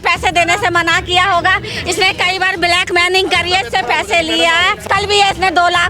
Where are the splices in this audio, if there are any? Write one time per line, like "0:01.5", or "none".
0:04.8